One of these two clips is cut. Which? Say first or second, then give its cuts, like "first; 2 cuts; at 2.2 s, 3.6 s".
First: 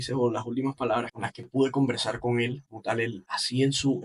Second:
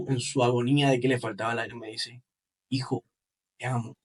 first; 2 cuts; at 1.1 s, 3.1 s